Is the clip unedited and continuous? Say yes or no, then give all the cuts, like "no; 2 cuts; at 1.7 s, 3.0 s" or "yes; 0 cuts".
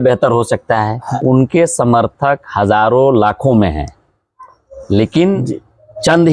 no; 1 cut; at 1.1 s